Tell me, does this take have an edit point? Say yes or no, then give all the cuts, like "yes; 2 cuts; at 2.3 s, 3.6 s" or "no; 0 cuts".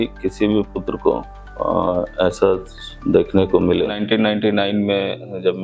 yes; 1 cut; at 4.0 s